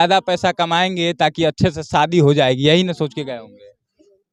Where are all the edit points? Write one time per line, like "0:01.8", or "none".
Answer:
none